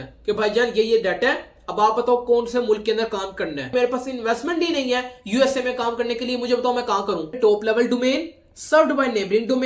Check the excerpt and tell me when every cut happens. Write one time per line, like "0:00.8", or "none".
0:03.7
0:07.4